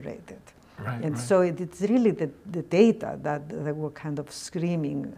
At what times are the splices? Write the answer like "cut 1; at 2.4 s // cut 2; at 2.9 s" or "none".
none